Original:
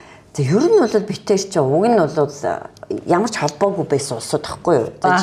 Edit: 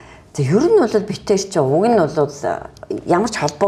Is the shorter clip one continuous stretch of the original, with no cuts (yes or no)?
yes